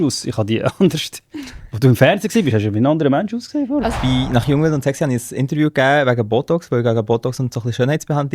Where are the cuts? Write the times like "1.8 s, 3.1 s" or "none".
3.9 s